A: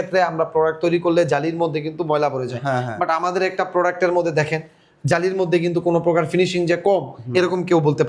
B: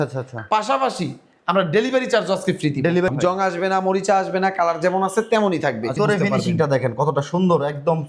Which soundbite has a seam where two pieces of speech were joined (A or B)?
B